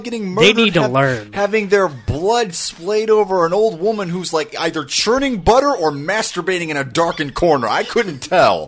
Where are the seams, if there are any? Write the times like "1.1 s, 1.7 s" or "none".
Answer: none

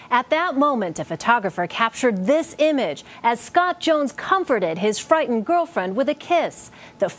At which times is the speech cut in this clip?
none

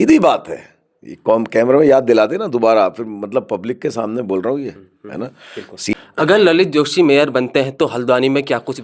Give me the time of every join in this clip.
5.9 s

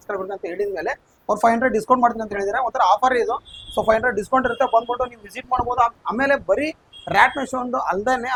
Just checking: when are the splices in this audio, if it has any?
none

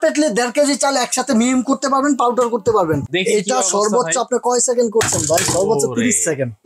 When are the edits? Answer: 3.0 s

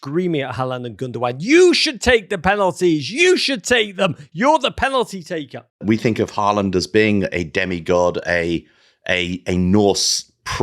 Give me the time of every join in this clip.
5.8 s

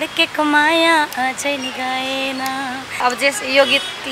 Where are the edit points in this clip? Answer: 3.0 s

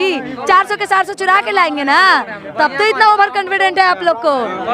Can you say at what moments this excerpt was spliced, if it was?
none

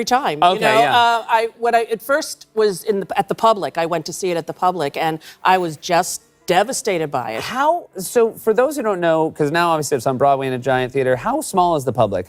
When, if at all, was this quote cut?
none

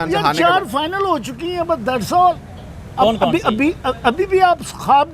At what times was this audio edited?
none

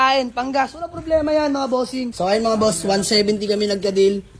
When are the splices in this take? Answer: 2.1 s

